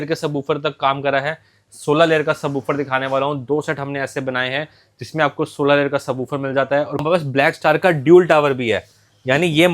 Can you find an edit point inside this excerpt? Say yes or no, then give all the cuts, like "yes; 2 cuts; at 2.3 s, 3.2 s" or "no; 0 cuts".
yes; 1 cut; at 7.0 s